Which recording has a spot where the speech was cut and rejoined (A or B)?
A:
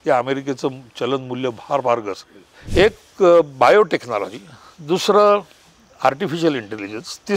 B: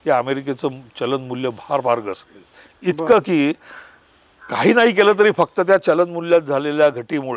A